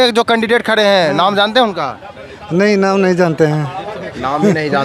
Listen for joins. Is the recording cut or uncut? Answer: uncut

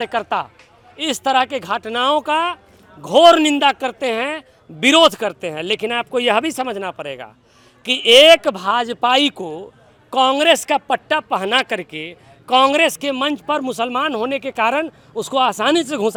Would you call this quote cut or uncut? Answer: uncut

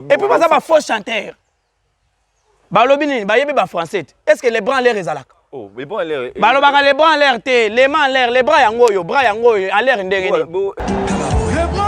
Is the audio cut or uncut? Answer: cut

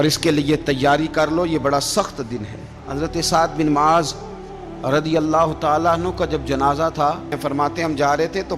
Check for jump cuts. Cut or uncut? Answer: cut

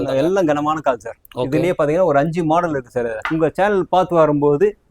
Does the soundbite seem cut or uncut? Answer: cut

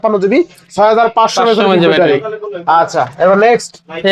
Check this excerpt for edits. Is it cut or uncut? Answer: uncut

